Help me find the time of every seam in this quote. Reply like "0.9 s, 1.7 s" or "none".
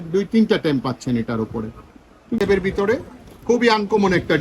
2.4 s